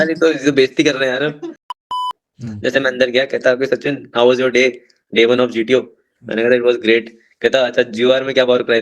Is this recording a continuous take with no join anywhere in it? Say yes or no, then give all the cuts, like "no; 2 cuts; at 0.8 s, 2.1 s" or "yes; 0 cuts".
no; 1 cut; at 1.9 s